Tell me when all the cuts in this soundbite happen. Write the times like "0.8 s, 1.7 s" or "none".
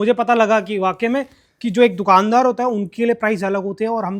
none